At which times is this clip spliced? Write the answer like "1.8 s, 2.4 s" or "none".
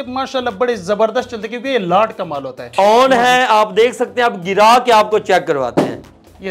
2.6 s